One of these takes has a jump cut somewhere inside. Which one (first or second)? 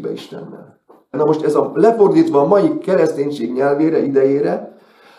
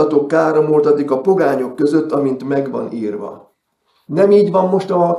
first